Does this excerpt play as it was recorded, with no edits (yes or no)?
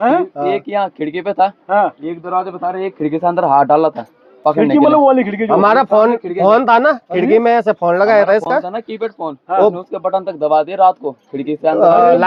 yes